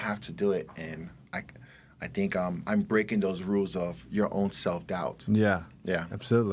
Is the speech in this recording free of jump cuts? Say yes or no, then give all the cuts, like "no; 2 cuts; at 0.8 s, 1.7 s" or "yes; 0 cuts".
yes; 0 cuts